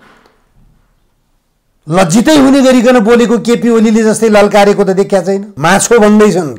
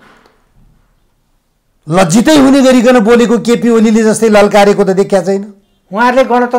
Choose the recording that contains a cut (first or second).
first